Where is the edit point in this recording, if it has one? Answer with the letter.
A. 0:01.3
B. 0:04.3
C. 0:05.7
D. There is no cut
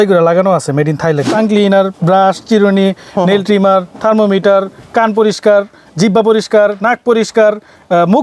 A